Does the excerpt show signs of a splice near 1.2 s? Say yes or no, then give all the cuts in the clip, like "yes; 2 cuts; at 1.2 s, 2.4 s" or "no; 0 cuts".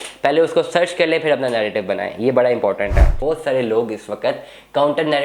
no; 1 cut; at 3.1 s